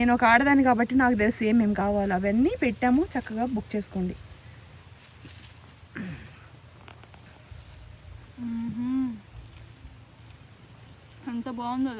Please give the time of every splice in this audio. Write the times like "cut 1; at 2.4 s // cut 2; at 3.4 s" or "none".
none